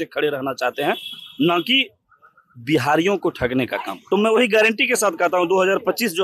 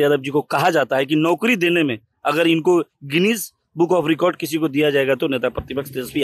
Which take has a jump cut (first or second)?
first